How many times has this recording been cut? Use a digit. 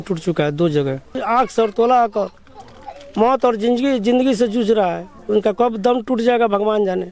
1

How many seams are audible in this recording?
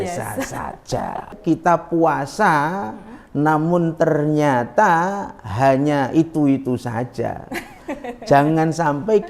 1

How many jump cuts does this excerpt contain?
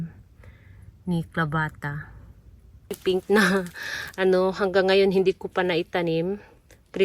1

